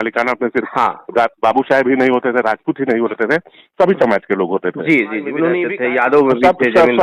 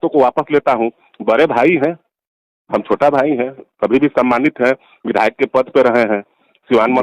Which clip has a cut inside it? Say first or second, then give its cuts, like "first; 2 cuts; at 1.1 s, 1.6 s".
first; 1 cut; at 5.7 s